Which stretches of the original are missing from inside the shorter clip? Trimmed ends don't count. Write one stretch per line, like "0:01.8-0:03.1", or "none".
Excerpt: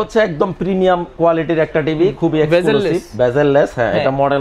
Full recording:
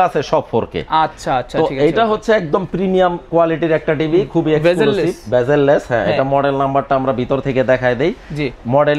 none